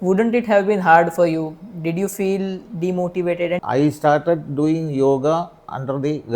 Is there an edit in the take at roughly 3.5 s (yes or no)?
yes